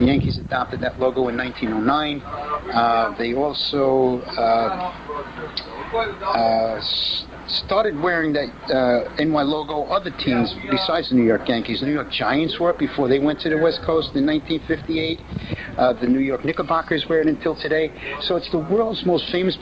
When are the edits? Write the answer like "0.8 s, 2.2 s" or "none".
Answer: 14.9 s